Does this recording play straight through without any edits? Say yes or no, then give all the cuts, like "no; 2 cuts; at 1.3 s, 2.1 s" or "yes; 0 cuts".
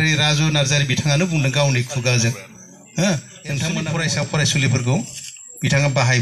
no; 1 cut; at 3.8 s